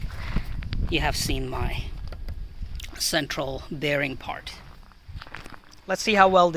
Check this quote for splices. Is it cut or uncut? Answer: uncut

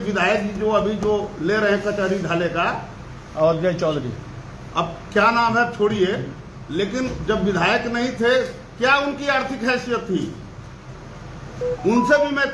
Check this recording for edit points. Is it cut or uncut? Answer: uncut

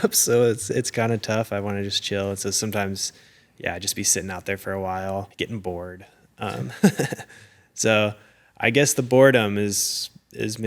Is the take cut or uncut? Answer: cut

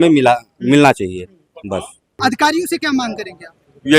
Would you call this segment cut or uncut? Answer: cut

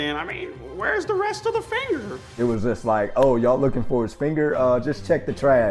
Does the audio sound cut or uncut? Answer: cut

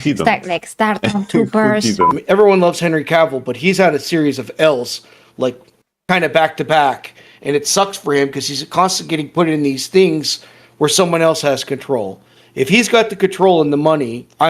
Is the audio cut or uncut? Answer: cut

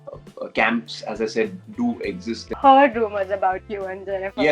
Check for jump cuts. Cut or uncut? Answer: cut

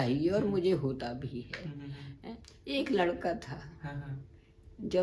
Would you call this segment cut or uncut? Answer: cut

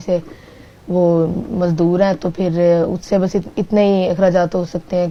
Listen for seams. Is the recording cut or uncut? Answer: uncut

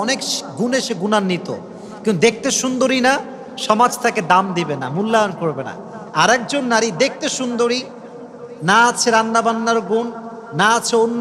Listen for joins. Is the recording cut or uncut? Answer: uncut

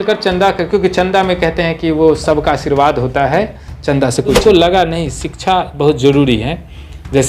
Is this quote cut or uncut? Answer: cut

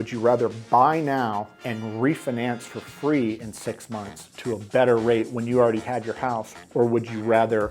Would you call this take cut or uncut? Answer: cut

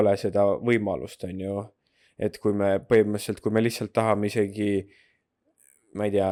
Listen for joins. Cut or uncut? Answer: uncut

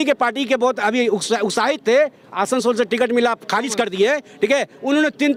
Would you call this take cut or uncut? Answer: uncut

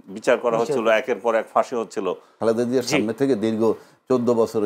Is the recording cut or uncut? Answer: cut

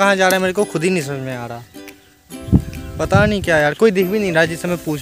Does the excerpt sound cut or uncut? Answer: uncut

